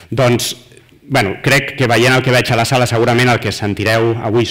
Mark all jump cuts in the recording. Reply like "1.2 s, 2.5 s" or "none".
2.1 s